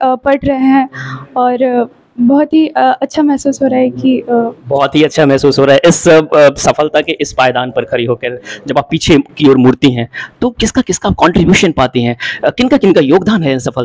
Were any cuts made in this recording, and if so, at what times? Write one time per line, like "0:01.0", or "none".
none